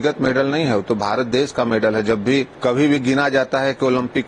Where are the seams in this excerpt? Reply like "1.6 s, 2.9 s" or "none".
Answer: 2.5 s